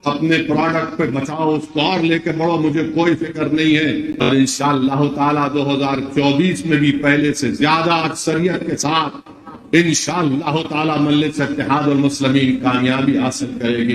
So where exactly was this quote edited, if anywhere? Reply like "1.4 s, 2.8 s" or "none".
4.1 s